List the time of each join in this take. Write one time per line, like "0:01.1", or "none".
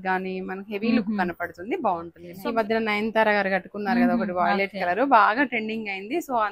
0:02.2

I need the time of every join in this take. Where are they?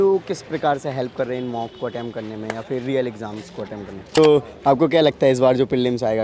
0:04.0

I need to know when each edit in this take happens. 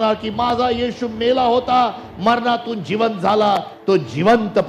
none

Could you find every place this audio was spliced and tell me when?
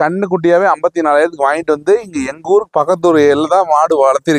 none

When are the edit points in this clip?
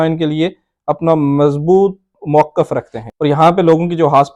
0:03.1

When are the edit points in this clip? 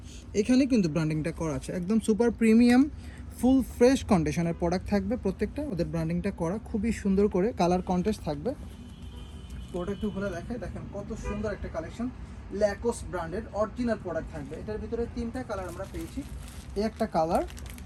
none

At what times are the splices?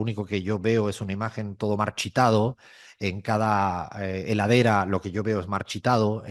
none

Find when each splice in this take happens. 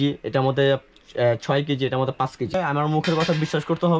0:02.6

